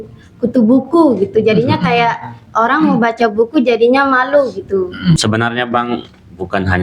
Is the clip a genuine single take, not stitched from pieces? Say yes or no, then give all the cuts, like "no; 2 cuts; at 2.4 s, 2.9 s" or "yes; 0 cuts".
no; 1 cut; at 5.2 s